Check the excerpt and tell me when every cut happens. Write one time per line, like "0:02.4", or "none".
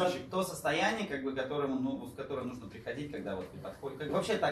none